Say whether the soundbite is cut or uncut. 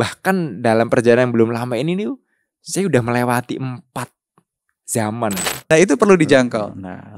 cut